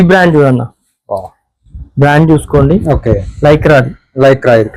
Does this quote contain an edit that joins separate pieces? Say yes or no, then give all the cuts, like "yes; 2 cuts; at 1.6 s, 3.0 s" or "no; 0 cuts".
no; 0 cuts